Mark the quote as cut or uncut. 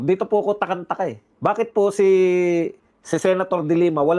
cut